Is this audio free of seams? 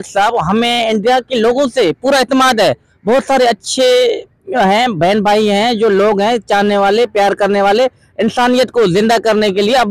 yes; 0 cuts

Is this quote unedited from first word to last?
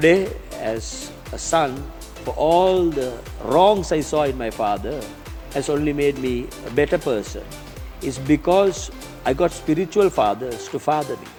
yes; 0 cuts

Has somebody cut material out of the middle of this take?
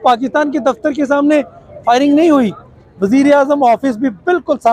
no; 0 cuts

